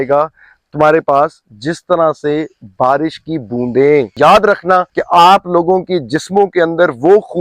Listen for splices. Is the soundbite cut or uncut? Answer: cut